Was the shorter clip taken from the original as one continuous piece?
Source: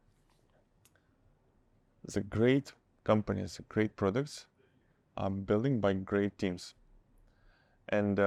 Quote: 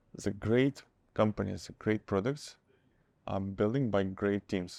yes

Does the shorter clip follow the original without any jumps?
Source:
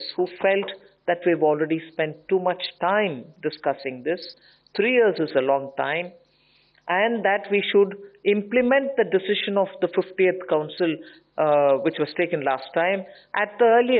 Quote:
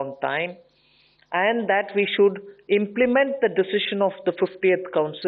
yes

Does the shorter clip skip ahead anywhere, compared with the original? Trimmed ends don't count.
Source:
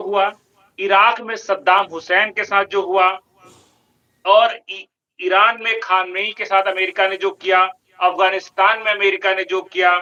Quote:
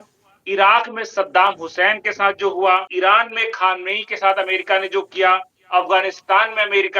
yes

